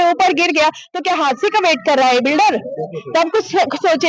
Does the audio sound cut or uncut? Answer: uncut